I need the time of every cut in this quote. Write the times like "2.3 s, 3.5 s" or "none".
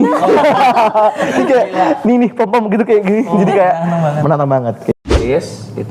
4.9 s

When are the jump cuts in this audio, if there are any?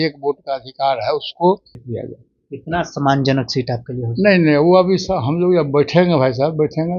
1.8 s

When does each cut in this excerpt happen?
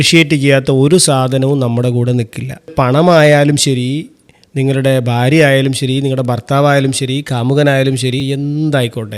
2.7 s, 8.2 s

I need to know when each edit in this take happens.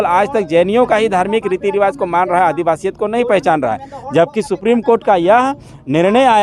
none

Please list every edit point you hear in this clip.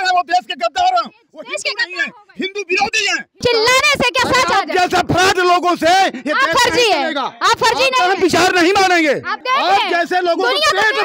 3.4 s, 9.3 s

